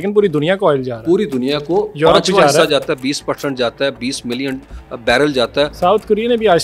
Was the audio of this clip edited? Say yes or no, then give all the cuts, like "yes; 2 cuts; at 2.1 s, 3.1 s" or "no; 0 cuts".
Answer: no; 0 cuts